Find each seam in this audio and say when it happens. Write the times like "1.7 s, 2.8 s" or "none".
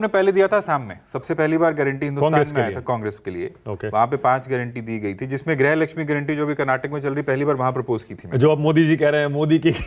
none